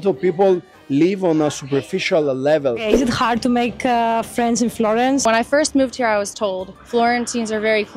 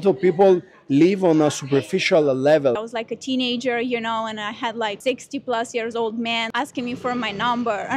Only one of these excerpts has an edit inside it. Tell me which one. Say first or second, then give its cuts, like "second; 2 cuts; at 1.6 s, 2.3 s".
second; 3 cuts; at 2.8 s, 5.0 s, 6.5 s